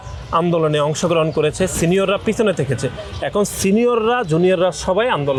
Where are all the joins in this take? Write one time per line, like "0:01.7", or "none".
none